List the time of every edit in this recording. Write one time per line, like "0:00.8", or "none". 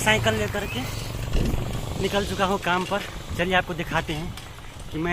none